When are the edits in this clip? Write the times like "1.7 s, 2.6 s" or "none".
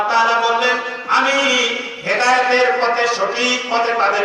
none